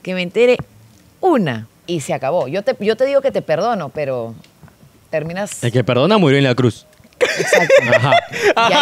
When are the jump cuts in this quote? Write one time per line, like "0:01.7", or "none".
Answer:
none